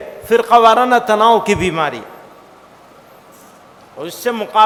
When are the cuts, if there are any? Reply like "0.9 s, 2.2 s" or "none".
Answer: none